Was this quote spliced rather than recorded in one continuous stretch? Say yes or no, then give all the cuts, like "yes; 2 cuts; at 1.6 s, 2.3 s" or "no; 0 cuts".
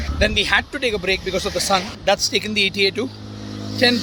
no; 0 cuts